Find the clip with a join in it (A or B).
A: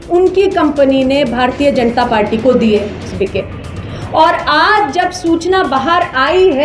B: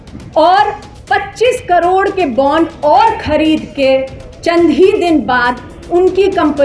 A